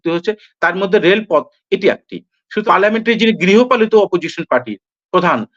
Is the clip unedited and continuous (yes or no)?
no